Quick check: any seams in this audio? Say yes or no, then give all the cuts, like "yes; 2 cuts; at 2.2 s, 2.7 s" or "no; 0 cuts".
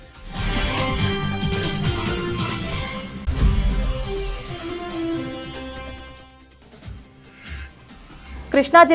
yes; 2 cuts; at 3.3 s, 7.8 s